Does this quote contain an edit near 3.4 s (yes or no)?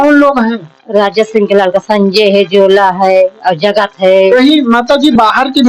no